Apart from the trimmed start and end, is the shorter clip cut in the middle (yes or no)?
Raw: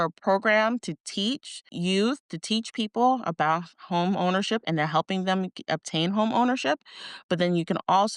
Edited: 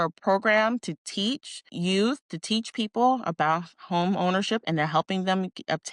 no